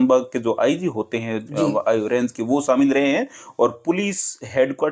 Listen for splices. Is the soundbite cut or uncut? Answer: uncut